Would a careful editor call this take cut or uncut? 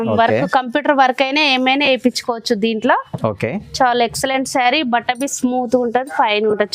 uncut